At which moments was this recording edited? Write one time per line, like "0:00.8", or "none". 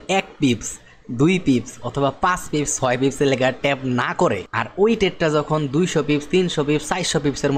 0:04.5